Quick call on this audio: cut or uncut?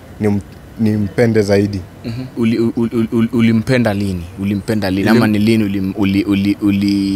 cut